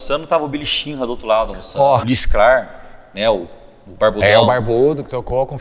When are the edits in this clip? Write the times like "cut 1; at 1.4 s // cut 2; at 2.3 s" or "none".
cut 1; at 2.0 s